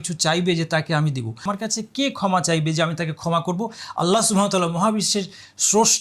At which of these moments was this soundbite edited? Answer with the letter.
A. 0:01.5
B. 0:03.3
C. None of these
A